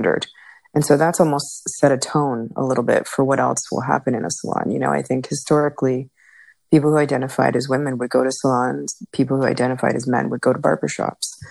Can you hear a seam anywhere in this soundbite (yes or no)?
no